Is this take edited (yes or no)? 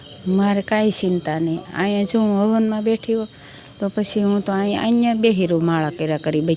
no